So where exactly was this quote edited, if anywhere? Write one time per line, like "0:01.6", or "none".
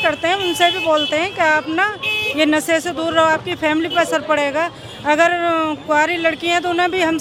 none